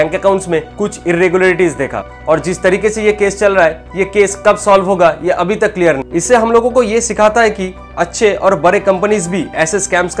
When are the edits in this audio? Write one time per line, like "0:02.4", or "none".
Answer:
0:02.1
0:06.0